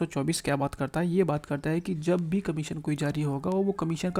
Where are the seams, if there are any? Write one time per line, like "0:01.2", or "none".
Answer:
none